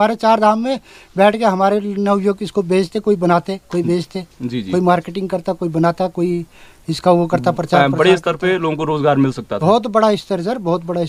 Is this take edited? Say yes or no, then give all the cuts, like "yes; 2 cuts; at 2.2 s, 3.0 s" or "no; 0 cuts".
no; 0 cuts